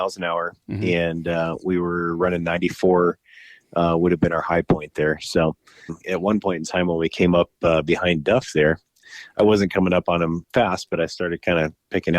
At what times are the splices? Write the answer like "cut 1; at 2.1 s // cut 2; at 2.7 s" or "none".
cut 1; at 6.0 s // cut 2; at 8.9 s